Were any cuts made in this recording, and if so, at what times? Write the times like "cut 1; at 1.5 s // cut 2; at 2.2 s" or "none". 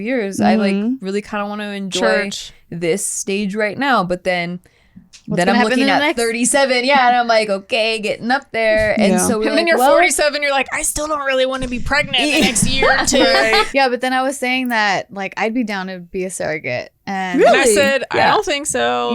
cut 1; at 13.7 s